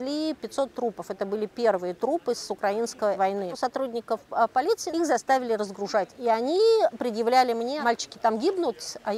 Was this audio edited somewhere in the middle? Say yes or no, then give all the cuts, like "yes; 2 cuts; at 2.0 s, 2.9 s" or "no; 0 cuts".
yes; 4 cuts; at 3.5 s, 4.9 s, 6.1 s, 7.7 s